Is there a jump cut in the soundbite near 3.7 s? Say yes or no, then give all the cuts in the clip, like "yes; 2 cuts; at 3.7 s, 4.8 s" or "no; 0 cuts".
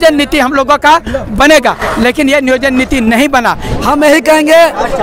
yes; 1 cut; at 3.7 s